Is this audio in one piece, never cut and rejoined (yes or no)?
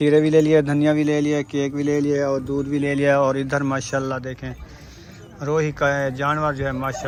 yes